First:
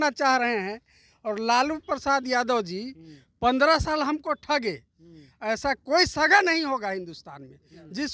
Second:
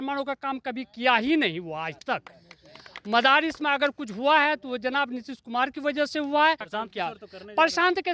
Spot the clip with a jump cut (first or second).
second